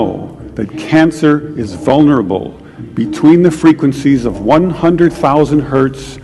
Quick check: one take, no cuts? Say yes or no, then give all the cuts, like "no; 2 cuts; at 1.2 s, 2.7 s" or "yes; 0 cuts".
yes; 0 cuts